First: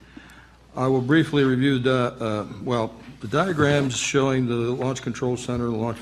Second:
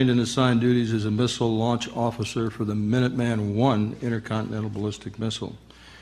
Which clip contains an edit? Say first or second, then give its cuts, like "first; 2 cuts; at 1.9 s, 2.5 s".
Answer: second; 1 cut; at 2.0 s